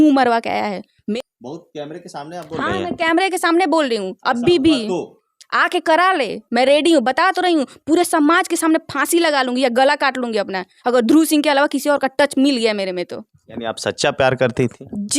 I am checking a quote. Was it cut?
yes; 1 cut; at 1.0 s

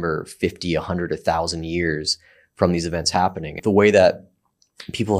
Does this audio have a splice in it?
yes; 1 cut; at 3.5 s

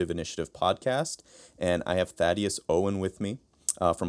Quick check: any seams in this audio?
no; 0 cuts

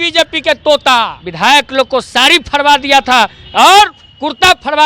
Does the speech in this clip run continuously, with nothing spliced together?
no; 1 cut; at 1.2 s

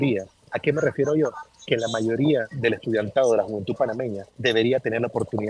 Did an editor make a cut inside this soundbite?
yes; 2 cuts; at 2.5 s, 4.3 s

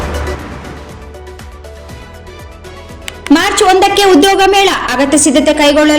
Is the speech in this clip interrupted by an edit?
yes; 1 cut; at 3.0 s

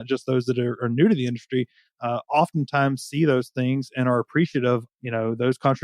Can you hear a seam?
yes; 1 cut; at 4.9 s

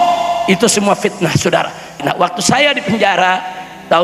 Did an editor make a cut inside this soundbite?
yes; 1 cut; at 2.0 s

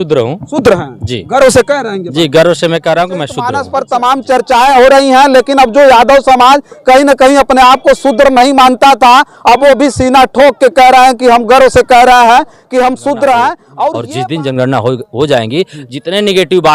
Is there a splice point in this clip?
yes; 2 cuts; at 3.5 s, 14.0 s

